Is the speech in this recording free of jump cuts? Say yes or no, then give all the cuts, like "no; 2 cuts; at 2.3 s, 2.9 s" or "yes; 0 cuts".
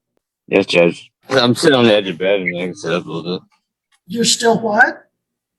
no; 1 cut; at 1.1 s